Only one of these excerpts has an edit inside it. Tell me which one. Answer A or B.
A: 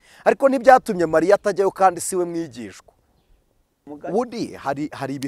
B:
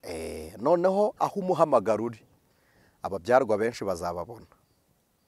A